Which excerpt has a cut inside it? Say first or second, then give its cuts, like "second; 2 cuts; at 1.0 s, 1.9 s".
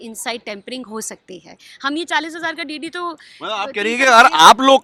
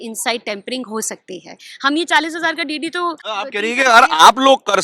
second; 1 cut; at 3.2 s